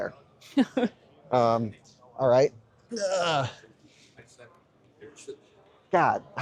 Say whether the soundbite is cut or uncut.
uncut